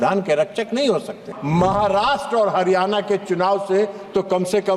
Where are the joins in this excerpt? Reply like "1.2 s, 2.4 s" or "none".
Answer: 1.3 s